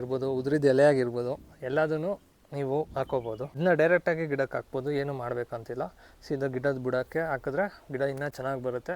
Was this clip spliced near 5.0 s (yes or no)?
no